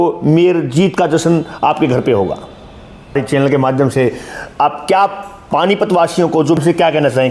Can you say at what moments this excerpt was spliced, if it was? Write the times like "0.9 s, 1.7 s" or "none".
3.1 s, 6.3 s